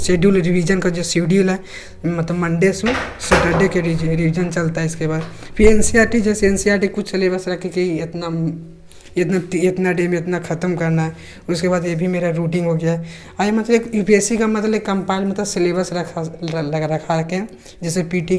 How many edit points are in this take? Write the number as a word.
zero